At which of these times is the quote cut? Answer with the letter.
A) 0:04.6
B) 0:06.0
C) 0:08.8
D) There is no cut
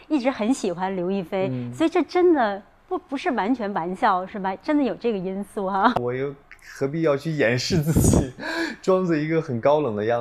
B